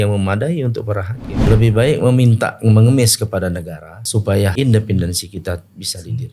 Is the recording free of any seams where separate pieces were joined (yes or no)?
no